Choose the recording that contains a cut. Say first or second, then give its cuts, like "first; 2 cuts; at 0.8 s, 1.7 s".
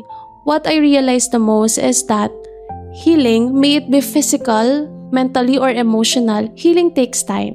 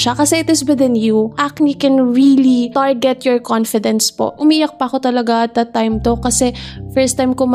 second; 3 cuts; at 1.4 s, 2.7 s, 4.3 s